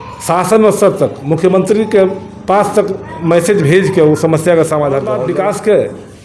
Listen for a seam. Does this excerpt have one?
no; 0 cuts

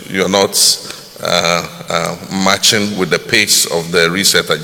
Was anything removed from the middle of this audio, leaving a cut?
no; 0 cuts

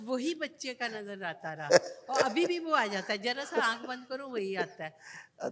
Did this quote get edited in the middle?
no; 0 cuts

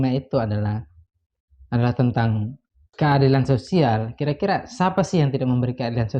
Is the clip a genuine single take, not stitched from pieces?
yes; 0 cuts

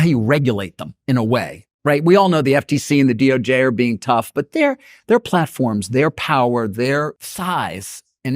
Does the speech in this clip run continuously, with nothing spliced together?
no; 1 cut; at 7.2 s

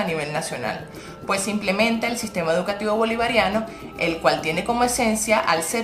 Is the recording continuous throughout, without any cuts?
no; 1 cut; at 1.4 s

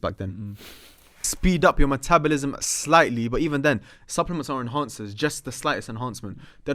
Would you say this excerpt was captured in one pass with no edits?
no; 1 cut; at 1.3 s

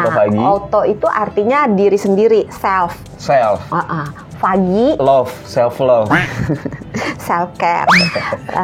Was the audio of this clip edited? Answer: no; 0 cuts

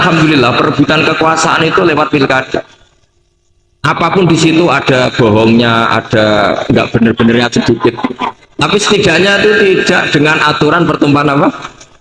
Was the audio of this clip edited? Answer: no; 0 cuts

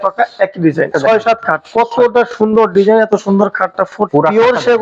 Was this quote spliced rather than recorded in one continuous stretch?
yes; 2 cuts; at 0.9 s, 4.1 s

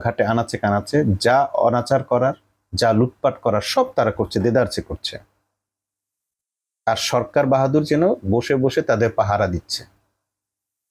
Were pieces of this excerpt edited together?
no; 0 cuts

